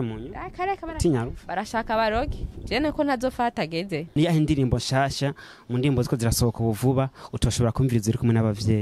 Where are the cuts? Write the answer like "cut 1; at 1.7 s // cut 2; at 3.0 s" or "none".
cut 1; at 4.1 s